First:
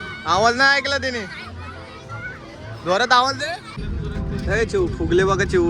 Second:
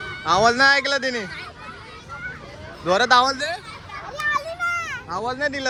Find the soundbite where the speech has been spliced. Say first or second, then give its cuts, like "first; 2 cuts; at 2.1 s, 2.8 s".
first; 1 cut; at 3.9 s